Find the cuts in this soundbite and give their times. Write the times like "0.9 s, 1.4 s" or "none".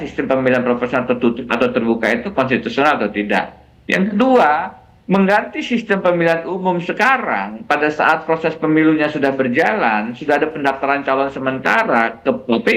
none